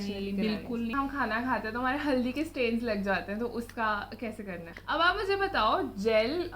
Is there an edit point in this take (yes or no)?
yes